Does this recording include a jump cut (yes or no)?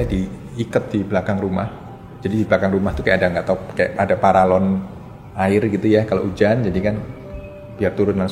no